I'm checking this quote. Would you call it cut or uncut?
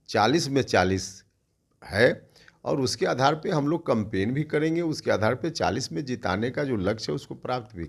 uncut